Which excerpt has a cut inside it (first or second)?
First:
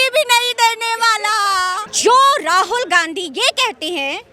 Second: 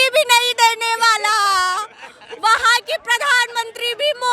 first